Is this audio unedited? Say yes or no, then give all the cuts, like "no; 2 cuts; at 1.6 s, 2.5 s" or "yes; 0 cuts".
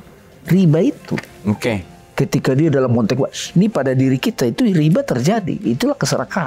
yes; 0 cuts